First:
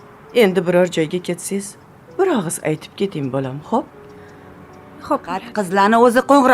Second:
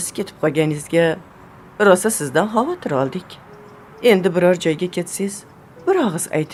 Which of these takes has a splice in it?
first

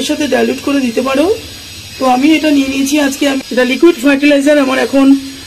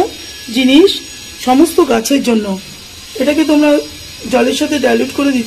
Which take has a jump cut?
first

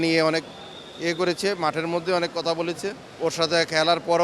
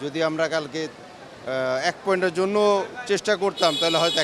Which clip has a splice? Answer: first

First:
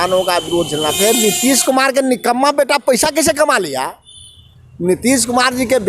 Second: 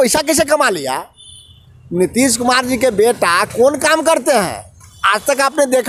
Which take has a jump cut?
first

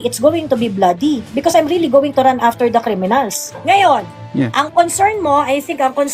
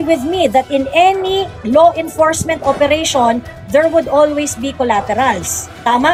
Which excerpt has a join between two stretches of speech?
first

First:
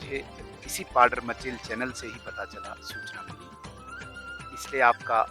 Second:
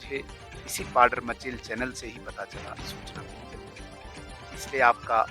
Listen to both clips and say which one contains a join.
second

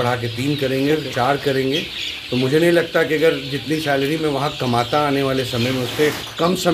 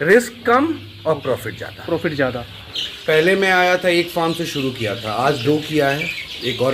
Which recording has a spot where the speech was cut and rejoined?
second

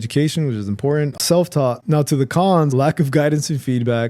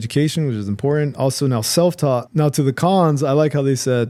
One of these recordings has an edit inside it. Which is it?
first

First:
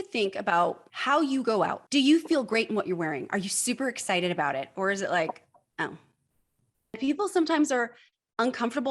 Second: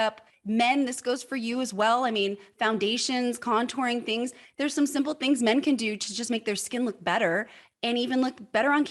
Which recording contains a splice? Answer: first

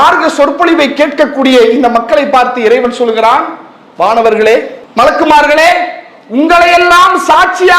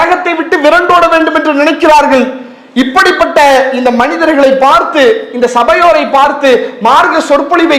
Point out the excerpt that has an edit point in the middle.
first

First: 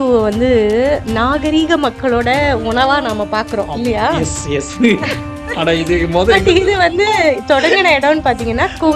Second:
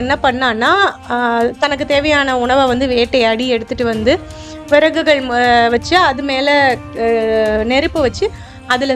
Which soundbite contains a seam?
first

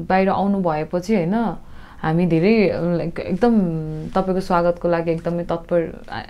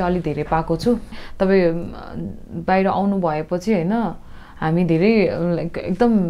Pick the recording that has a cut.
second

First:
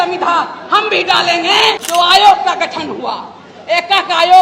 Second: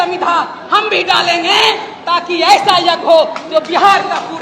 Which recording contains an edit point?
first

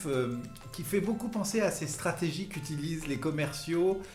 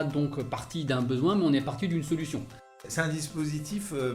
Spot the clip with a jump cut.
second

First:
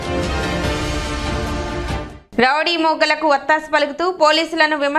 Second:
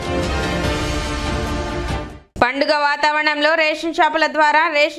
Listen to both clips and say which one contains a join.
second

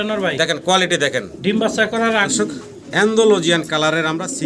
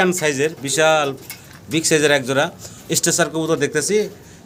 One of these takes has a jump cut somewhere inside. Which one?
first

